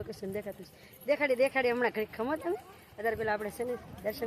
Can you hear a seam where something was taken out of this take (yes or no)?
no